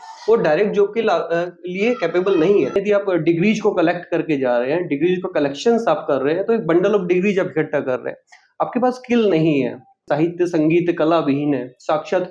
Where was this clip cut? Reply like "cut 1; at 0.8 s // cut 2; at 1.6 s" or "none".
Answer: cut 1; at 2.8 s // cut 2; at 10.0 s